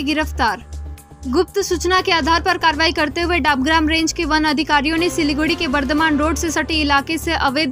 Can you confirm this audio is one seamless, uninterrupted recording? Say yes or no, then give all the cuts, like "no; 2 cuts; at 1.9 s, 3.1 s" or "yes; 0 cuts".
yes; 0 cuts